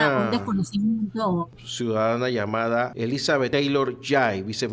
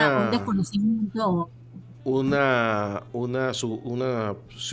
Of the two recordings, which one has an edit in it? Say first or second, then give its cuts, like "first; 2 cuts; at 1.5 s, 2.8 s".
first; 2 cuts; at 1.6 s, 3.3 s